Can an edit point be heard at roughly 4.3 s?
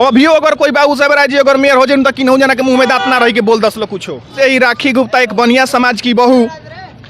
yes; 1 cut; at 4.3 s

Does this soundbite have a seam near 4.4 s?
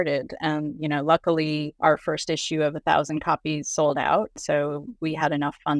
yes; 2 cuts; at 1.7 s, 4.4 s

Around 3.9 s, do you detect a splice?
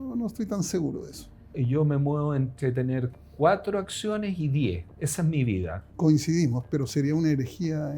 no; 2 cuts; at 1.5 s, 5.9 s

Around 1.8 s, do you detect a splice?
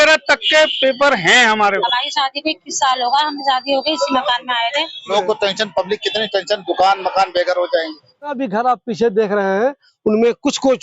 yes; 3 cuts; at 1.8 s, 5.1 s, 8.4 s

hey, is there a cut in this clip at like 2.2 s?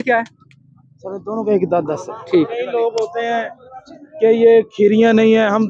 yes; 1 cut; at 2.2 s

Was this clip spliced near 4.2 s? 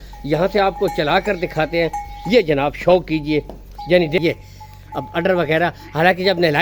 yes; 1 cut; at 4.2 s

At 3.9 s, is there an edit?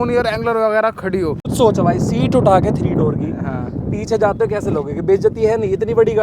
no; 1 cut; at 1.5 s

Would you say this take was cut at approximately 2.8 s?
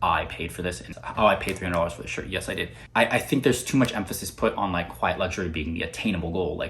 yes; 2 cuts; at 1.0 s, 2.8 s

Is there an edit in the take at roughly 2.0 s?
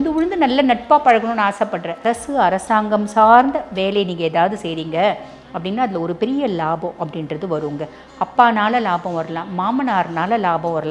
yes; 1 cut; at 2.0 s

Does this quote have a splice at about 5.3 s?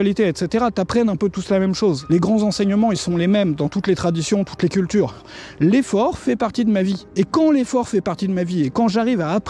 yes; 2 cuts; at 2.0 s, 5.3 s

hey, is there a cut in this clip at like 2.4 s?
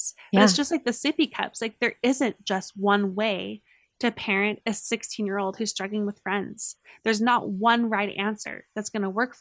no; 0 cuts

